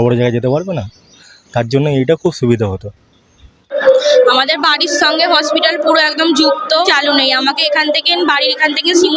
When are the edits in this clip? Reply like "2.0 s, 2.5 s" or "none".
3.7 s, 6.9 s